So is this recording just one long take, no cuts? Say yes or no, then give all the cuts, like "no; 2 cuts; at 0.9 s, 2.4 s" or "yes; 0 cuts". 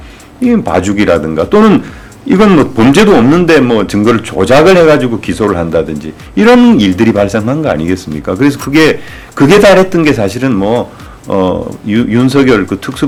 yes; 0 cuts